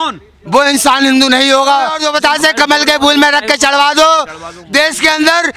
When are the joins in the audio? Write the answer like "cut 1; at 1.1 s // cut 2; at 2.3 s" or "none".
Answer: cut 1; at 2.0 s